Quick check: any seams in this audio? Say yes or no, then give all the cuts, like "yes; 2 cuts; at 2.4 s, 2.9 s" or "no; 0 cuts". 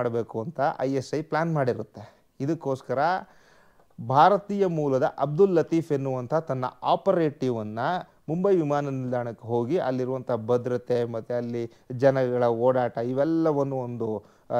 no; 0 cuts